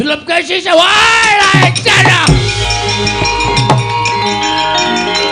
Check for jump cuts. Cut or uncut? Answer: cut